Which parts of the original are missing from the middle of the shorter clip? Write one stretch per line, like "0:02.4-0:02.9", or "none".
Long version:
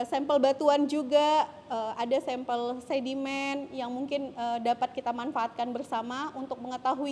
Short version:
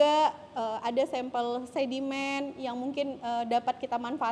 none